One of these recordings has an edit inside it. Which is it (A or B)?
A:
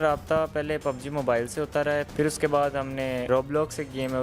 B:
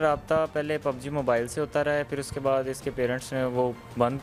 A